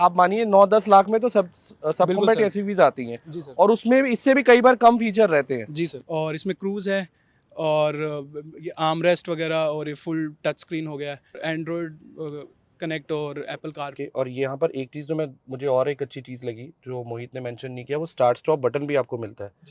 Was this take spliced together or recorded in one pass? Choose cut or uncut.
cut